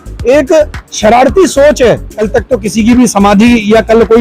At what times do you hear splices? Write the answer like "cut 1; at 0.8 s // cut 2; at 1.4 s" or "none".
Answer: cut 1; at 2.1 s